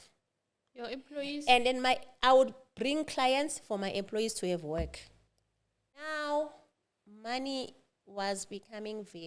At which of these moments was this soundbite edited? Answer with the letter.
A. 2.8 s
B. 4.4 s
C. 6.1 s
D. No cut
C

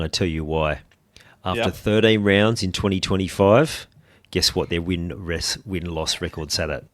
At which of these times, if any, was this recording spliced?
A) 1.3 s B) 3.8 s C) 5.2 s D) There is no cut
D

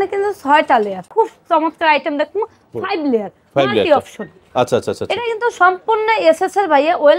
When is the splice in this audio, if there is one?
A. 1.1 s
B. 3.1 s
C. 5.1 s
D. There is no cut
A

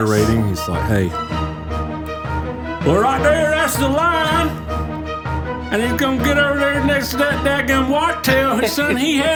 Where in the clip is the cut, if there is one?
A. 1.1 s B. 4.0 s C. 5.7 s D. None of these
D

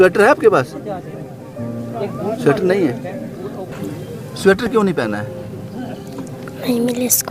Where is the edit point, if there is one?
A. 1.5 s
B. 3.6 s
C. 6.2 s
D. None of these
B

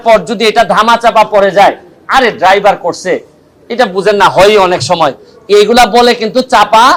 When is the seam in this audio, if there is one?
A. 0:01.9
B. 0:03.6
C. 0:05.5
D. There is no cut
D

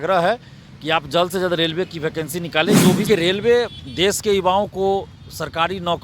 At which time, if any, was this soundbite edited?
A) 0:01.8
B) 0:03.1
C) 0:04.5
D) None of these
B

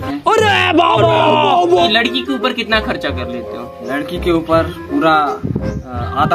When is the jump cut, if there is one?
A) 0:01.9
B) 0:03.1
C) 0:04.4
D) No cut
A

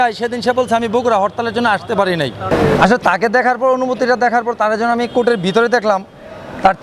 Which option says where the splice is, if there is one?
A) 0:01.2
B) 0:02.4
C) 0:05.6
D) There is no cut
B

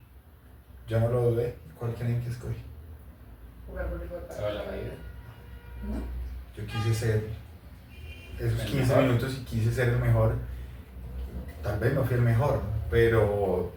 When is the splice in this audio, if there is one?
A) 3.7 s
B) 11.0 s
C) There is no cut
C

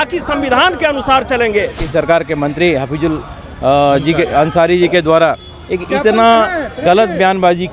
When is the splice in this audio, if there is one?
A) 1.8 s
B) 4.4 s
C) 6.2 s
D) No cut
A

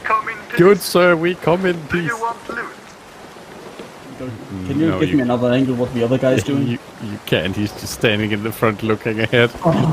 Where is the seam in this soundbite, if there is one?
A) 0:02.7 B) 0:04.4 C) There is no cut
B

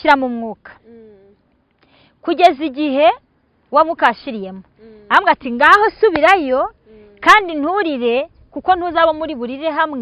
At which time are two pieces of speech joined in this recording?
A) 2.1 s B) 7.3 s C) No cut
C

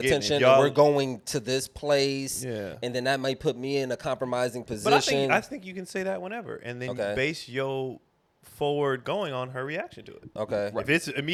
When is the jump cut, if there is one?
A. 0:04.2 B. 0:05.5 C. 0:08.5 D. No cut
D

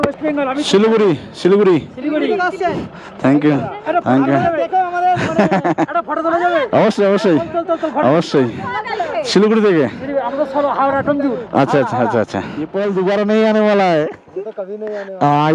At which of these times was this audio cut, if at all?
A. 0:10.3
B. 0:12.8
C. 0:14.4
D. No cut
B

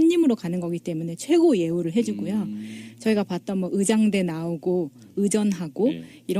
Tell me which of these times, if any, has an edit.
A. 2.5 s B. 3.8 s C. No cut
C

